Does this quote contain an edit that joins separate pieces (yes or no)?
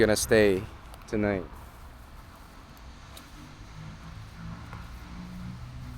no